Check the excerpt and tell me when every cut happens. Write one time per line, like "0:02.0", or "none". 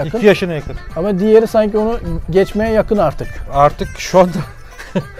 none